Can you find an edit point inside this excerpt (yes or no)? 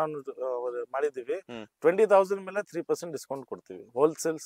no